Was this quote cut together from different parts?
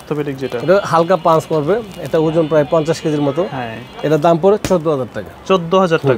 no; 0 cuts

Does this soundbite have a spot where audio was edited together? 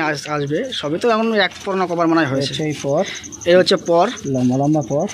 no; 0 cuts

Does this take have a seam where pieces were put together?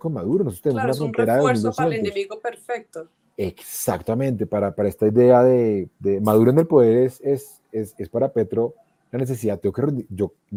no; 0 cuts

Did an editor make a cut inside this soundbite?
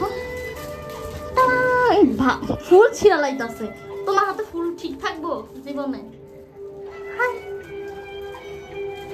no; 0 cuts

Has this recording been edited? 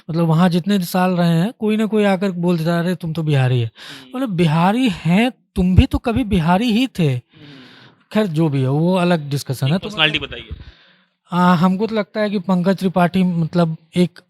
no; 0 cuts

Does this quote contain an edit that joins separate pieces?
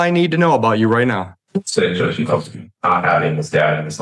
no; 0 cuts

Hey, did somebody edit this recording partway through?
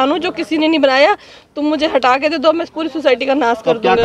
no; 0 cuts

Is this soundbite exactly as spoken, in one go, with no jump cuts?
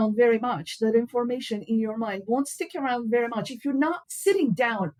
yes; 0 cuts

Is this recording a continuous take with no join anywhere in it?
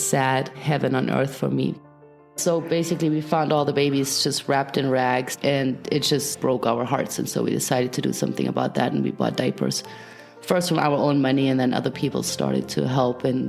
no; 1 cut; at 2.3 s

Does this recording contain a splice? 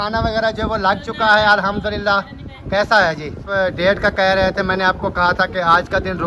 yes; 1 cut; at 3.6 s

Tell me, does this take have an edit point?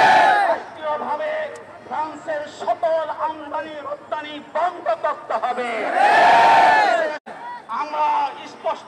yes; 1 cut; at 7.3 s

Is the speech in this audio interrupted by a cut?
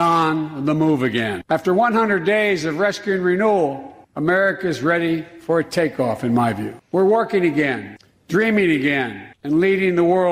no; 0 cuts

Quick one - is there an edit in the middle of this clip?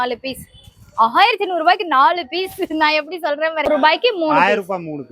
yes; 1 cut; at 3.7 s

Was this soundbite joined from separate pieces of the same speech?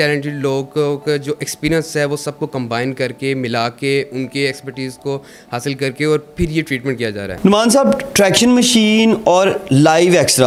no; 0 cuts

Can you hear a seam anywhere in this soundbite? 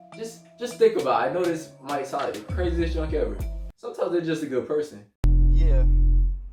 no; 0 cuts

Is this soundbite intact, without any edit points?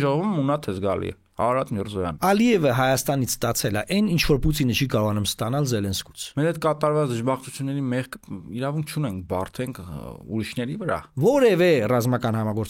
no; 3 cuts; at 2.1 s, 6.3 s, 11.1 s

